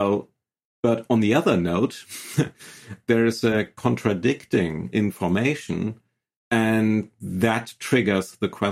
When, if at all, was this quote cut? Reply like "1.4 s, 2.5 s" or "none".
2.9 s